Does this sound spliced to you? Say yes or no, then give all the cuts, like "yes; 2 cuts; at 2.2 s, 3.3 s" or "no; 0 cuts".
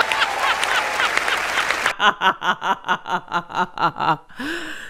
no; 0 cuts